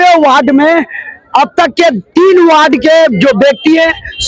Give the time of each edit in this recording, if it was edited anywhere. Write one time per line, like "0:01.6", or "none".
none